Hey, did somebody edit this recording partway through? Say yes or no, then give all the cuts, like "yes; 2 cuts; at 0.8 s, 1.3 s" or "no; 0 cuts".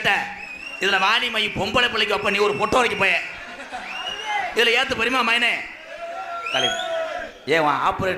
no; 0 cuts